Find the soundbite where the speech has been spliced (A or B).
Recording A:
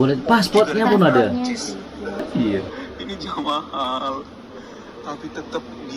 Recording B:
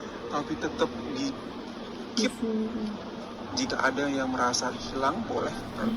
A